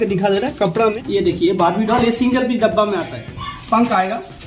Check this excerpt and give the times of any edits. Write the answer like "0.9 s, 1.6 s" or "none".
1.0 s, 3.5 s